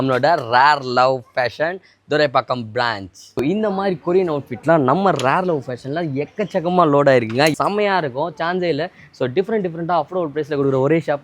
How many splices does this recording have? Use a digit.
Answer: 1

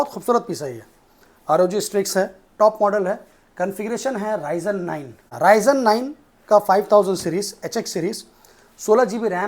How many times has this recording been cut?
1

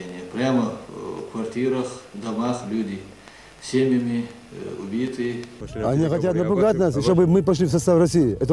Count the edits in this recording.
1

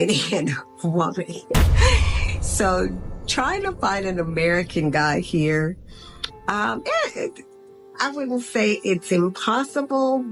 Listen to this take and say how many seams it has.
0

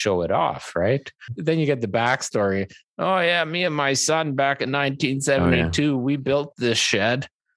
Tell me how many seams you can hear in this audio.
1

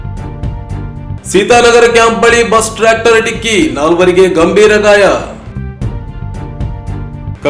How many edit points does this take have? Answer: 0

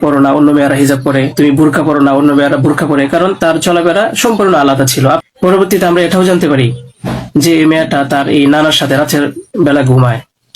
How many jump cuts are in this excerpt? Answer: 1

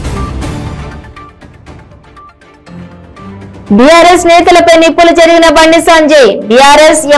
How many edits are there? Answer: 1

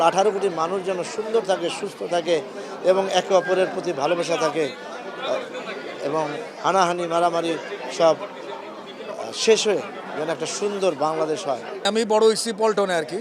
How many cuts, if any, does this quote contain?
1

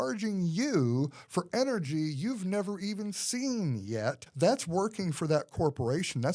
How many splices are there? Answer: 1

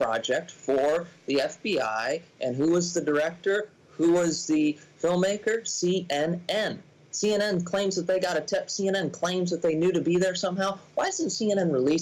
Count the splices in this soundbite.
0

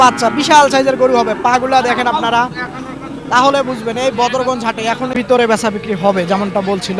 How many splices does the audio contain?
1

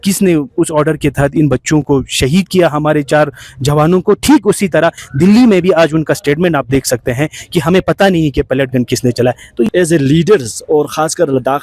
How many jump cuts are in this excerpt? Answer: 1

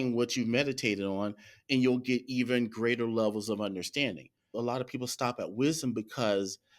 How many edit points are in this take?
1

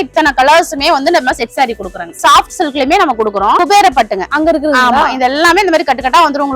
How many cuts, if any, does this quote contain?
2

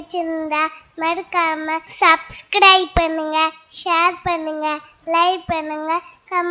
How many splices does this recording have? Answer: 1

